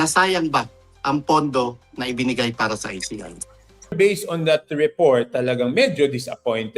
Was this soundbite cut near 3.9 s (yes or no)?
yes